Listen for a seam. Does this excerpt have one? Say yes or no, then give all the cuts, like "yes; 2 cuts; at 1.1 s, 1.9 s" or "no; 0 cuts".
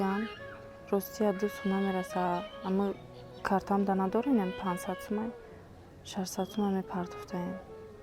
no; 0 cuts